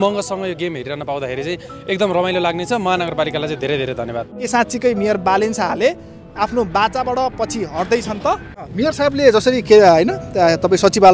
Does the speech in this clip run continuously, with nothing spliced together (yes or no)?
no